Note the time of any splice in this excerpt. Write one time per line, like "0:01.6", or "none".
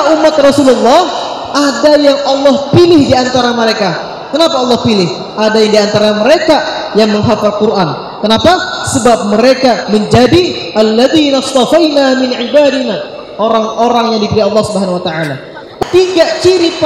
0:15.7

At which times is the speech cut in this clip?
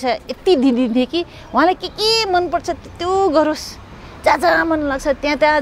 none

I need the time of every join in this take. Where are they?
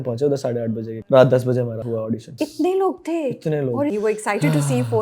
0:00.9
0:02.3
0:03.9

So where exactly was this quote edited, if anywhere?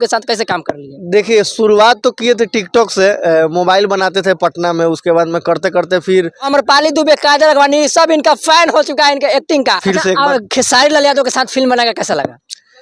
0:06.5
0:09.8

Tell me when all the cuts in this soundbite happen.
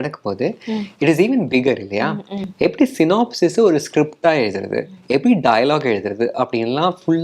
0:02.4

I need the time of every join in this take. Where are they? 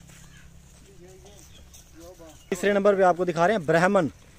0:02.6

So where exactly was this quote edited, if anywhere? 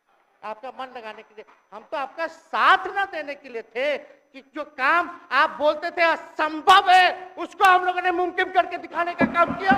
none

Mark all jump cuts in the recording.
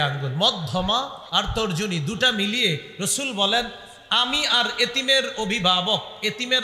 none

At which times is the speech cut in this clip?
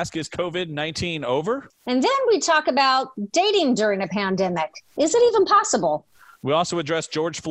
0:01.7

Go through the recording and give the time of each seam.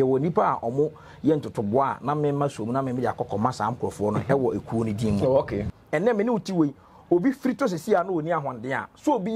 0:05.7

